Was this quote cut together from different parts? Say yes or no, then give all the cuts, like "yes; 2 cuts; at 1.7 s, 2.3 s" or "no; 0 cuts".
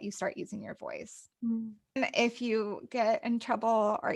yes; 1 cut; at 2.0 s